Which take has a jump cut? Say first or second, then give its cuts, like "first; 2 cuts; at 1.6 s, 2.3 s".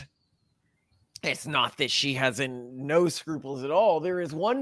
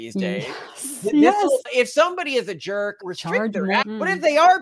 second; 3 cuts; at 1.7 s, 3.0 s, 3.8 s